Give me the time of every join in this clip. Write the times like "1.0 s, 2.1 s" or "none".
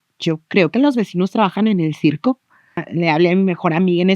2.8 s